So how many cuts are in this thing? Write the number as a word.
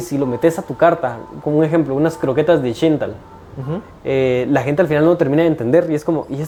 zero